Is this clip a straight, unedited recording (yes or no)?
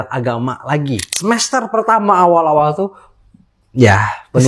no